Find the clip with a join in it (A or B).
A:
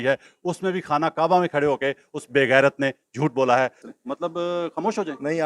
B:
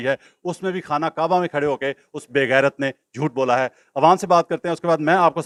A